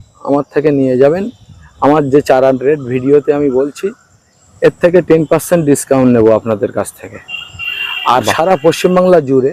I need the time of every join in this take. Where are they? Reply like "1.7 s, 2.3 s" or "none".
none